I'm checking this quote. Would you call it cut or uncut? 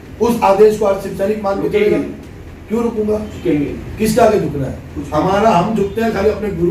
uncut